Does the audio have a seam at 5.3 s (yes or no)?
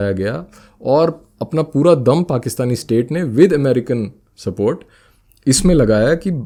no